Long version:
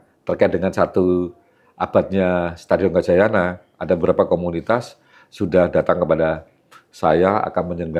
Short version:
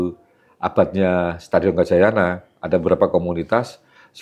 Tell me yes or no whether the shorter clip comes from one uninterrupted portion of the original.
yes